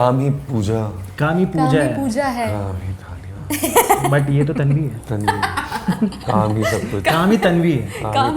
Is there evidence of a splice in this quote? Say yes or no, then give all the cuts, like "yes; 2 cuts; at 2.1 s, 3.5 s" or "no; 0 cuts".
no; 0 cuts